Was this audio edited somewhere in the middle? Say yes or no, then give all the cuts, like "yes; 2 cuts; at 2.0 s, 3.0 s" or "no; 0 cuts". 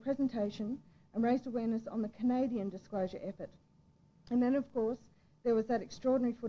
yes; 1 cut; at 2.1 s